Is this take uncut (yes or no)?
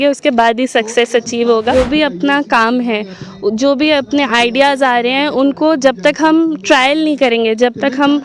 no